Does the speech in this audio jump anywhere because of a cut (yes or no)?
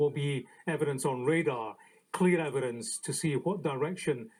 no